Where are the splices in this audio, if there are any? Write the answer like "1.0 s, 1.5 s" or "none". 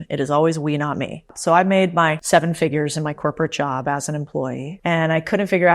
1.3 s, 2.2 s, 4.7 s